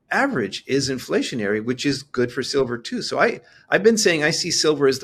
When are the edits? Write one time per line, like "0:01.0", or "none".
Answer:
none